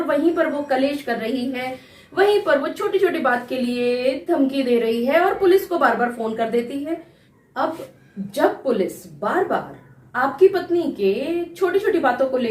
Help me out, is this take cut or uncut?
cut